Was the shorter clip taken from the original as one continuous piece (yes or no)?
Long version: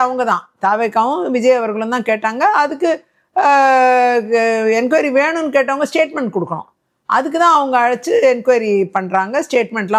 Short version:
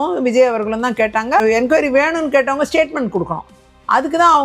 no